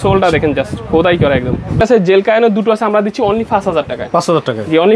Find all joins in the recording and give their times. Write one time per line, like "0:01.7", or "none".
0:01.8